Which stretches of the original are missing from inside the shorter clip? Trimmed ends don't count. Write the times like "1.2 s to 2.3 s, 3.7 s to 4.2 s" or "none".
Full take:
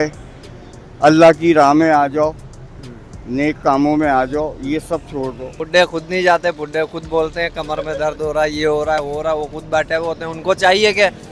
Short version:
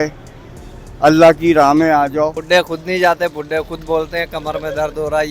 2.4 s to 5.6 s